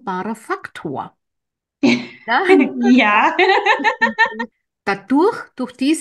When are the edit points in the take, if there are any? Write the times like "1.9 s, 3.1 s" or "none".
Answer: 4.5 s